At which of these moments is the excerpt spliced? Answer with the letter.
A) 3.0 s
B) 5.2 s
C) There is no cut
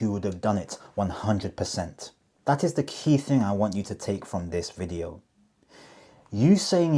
C